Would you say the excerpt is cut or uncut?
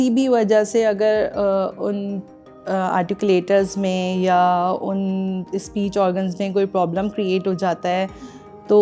uncut